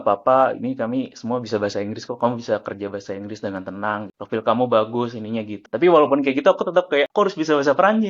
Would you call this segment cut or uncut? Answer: cut